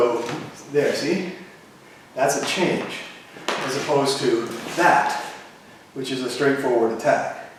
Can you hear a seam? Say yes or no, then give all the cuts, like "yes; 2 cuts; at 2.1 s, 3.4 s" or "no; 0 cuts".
no; 0 cuts